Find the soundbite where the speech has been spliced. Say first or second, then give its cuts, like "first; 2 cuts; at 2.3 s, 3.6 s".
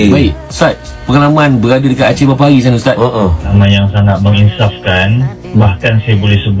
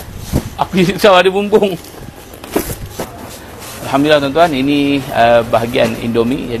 first; 1 cut; at 3.5 s